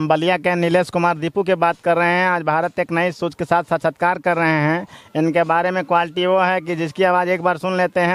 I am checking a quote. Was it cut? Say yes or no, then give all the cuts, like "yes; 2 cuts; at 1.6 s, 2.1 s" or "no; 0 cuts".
no; 0 cuts